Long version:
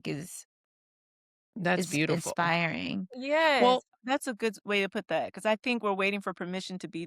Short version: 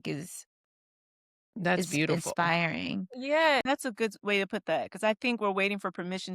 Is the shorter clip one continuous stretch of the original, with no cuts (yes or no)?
no